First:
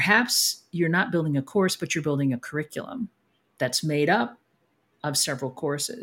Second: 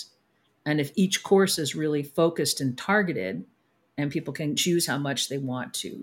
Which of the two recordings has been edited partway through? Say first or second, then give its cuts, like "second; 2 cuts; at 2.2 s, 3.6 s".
second; 1 cut; at 4.6 s